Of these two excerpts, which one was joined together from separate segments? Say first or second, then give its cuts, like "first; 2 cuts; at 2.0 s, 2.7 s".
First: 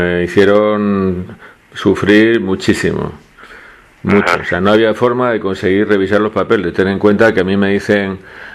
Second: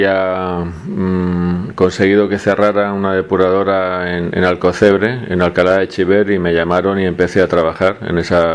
second; 1 cut; at 4.9 s